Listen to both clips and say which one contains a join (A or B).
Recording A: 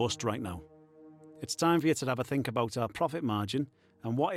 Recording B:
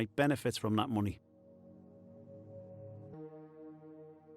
B